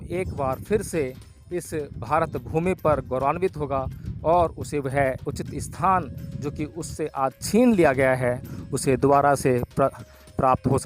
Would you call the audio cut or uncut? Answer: uncut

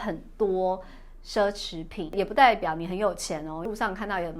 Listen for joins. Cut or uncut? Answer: cut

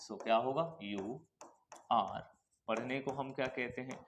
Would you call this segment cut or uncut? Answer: uncut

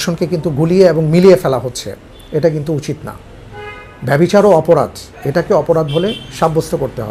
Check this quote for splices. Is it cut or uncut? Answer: uncut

